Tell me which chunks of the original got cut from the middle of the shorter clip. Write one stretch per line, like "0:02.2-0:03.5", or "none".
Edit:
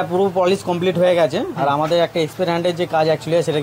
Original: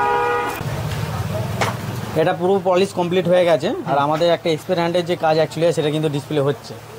none